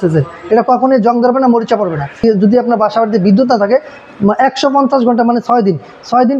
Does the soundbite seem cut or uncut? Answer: cut